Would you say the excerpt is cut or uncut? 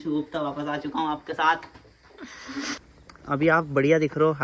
cut